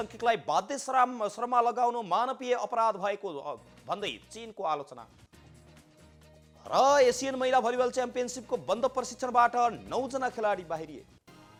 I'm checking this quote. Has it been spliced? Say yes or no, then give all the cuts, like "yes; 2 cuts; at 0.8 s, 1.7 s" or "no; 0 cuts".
no; 0 cuts